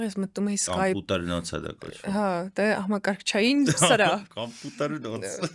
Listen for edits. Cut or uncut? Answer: uncut